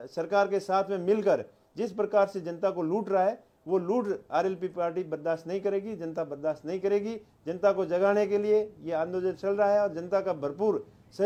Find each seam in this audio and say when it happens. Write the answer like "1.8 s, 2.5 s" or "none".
none